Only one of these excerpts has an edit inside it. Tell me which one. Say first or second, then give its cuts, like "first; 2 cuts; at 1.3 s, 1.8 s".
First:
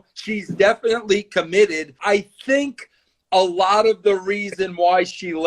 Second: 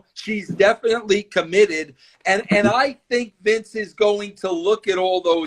first; 1 cut; at 2.0 s